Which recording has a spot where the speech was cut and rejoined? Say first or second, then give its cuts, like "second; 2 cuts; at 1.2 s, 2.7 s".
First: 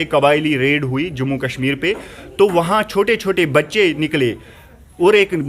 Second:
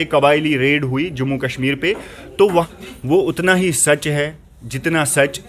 second; 1 cut; at 2.7 s